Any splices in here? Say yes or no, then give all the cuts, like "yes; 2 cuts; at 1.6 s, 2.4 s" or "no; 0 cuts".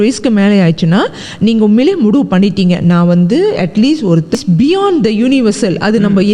yes; 1 cut; at 4.4 s